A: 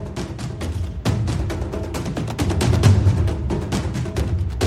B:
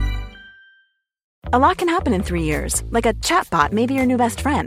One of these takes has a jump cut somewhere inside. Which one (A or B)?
B